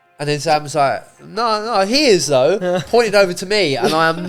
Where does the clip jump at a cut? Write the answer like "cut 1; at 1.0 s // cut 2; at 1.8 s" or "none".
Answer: none